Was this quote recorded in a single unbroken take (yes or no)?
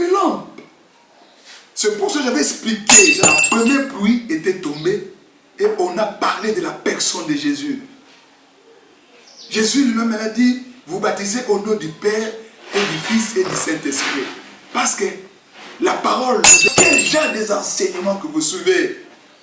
no